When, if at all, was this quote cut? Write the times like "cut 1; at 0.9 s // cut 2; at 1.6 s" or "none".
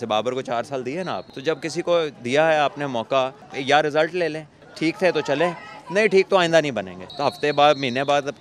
cut 1; at 1.3 s // cut 2; at 3.5 s // cut 3; at 4.6 s // cut 4; at 7.1 s